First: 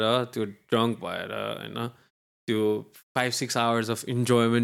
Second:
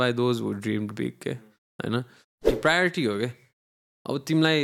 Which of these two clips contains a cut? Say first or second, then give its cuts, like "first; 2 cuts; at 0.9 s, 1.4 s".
second; 1 cut; at 2.5 s